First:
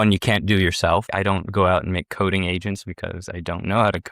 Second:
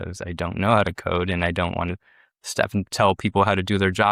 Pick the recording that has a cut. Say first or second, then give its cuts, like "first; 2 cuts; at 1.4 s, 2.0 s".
first; 1 cut; at 1.1 s